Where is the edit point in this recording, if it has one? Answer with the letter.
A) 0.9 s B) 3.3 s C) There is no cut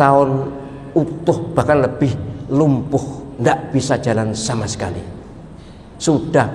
C